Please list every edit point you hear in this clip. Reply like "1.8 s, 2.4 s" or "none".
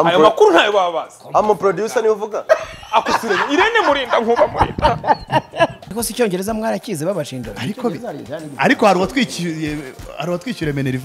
5.8 s

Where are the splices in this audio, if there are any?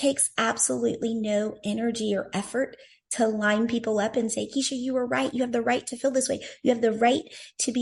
none

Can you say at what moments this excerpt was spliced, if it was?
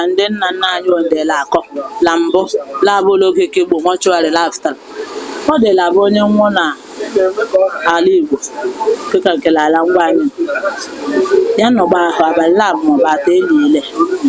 none

